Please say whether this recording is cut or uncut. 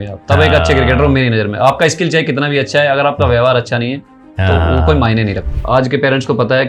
cut